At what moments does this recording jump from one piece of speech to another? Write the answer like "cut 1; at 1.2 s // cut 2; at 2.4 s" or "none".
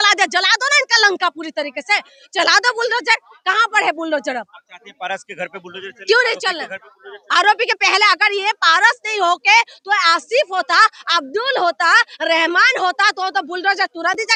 none